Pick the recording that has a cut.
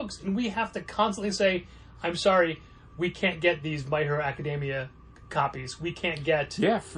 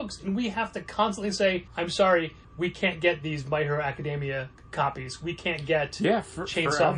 second; 3 cuts; at 1.7 s, 2.4 s, 4.6 s

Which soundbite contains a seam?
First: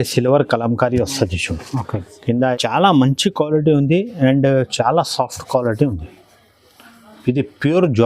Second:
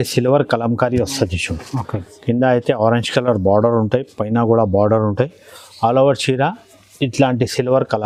first; 1 cut; at 2.6 s

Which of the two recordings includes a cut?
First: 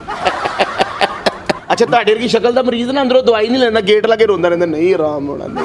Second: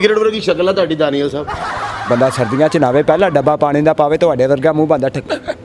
first; 1 cut; at 1.5 s

